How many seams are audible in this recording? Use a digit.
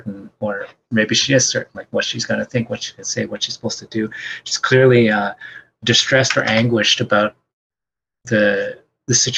0